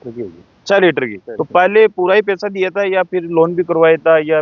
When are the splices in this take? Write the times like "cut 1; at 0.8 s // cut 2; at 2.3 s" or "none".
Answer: cut 1; at 1.2 s